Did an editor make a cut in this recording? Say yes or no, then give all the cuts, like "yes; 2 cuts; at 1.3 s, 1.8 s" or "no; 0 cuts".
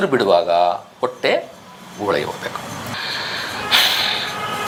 no; 0 cuts